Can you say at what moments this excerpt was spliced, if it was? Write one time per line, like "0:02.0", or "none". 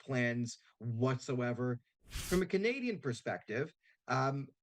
0:02.0